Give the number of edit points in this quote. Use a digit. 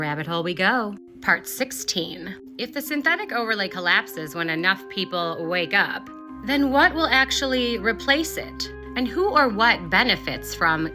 0